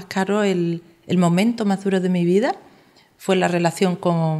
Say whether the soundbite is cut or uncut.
uncut